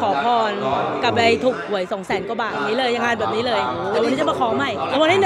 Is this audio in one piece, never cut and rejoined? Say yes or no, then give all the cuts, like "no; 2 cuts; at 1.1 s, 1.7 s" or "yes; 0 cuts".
yes; 0 cuts